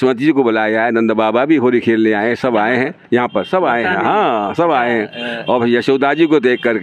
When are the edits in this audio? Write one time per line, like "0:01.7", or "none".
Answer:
none